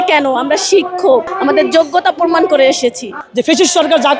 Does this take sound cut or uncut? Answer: cut